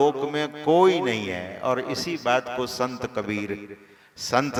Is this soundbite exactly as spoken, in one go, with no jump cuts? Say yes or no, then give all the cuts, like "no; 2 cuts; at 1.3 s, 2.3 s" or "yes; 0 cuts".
yes; 0 cuts